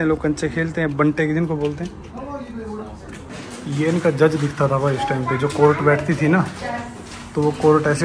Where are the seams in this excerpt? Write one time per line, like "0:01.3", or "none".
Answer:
0:03.2